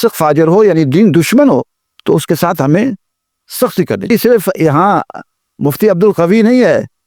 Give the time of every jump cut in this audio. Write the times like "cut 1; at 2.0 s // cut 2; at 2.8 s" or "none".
cut 1; at 4.1 s